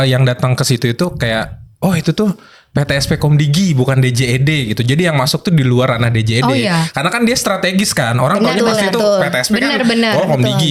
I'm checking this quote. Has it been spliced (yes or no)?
no